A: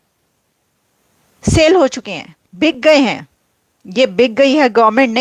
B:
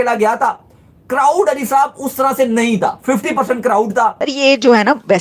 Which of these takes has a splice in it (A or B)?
B